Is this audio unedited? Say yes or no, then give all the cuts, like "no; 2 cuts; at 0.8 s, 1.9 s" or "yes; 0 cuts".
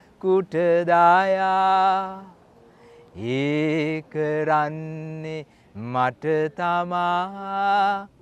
yes; 0 cuts